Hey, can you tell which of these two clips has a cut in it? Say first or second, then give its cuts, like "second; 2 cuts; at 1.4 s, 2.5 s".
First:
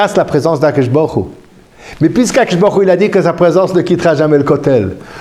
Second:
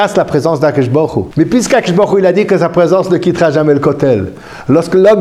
second; 1 cut; at 1.3 s